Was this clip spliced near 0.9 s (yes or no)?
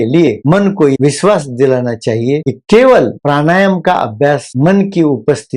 yes